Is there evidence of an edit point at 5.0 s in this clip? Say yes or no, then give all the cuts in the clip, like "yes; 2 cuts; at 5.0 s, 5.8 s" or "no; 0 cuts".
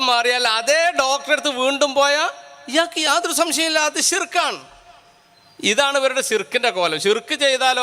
no; 0 cuts